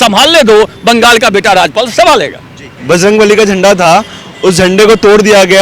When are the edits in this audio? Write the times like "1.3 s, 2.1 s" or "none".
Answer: none